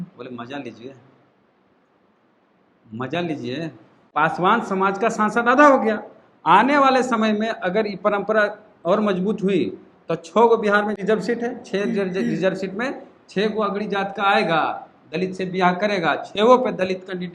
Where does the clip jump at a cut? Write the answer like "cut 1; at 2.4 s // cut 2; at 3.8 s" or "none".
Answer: cut 1; at 3.9 s // cut 2; at 11.0 s